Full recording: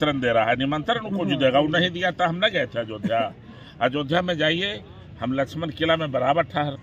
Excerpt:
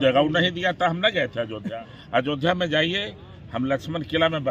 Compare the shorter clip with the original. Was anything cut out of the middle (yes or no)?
yes